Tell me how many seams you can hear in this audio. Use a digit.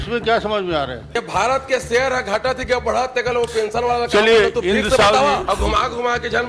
2